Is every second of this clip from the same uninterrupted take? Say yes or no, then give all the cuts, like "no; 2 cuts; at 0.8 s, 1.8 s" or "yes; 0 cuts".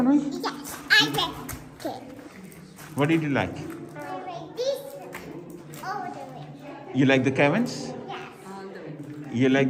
yes; 0 cuts